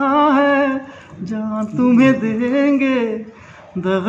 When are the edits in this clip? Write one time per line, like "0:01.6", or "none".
none

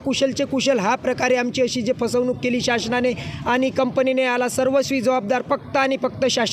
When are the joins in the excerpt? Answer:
none

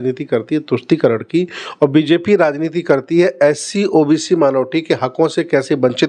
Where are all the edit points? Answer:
none

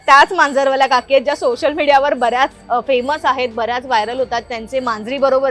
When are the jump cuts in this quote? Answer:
none

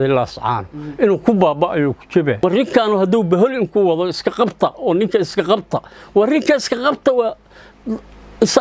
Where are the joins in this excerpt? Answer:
0:02.4

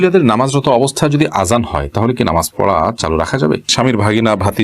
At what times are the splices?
0:03.7

